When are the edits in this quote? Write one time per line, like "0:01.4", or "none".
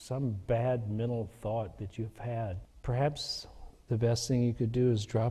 0:02.7